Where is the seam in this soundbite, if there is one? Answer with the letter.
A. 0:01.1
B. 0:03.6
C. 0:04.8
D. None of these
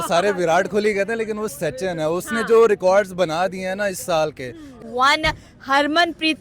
C